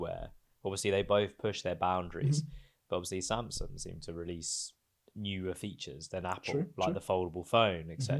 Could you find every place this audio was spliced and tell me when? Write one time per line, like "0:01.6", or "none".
none